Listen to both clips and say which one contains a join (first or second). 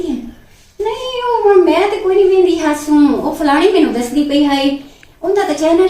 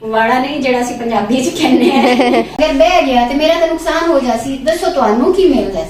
second